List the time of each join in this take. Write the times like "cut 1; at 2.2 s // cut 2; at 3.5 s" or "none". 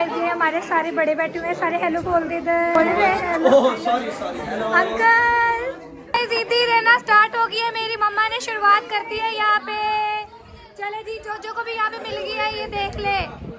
cut 1; at 2.8 s // cut 2; at 5.7 s